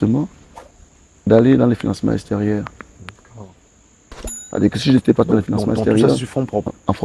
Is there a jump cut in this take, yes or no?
no